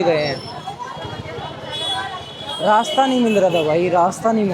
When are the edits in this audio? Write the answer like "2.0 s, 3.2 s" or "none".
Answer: none